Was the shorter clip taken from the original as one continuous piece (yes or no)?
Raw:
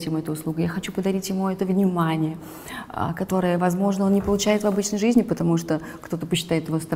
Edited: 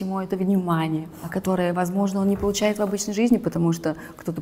no